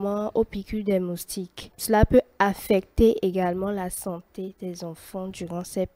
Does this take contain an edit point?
no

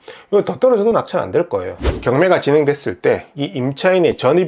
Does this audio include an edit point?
yes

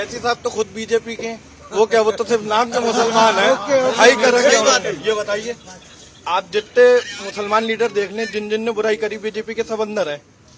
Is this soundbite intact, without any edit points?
yes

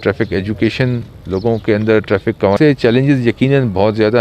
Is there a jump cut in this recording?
yes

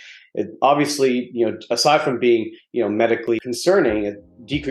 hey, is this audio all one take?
yes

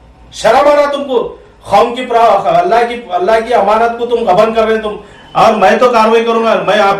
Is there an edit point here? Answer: yes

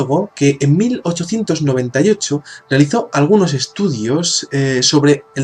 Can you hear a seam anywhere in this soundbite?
yes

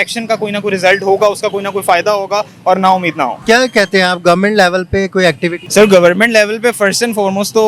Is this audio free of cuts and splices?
no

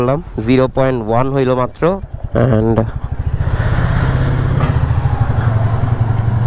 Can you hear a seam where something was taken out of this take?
yes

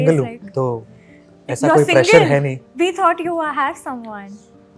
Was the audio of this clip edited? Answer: no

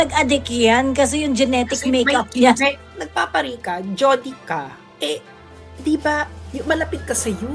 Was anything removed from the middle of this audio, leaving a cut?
yes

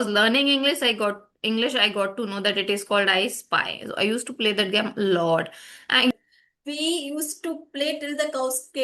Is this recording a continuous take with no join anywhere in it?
no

